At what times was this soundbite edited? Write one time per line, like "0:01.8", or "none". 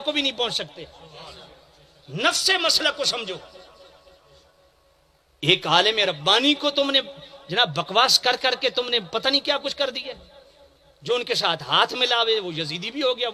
none